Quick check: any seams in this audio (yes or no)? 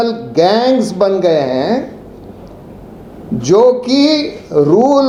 no